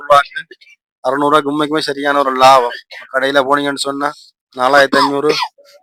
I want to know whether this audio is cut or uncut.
uncut